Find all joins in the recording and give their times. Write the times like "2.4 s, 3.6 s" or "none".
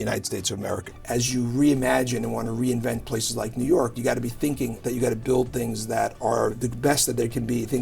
0.9 s, 4.8 s